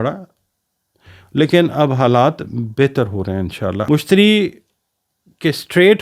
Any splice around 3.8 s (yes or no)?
yes